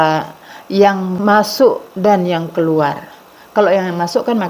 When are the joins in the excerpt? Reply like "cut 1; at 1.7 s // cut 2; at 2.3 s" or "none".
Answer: cut 1; at 1.1 s